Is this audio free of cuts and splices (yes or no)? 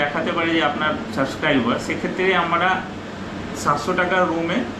yes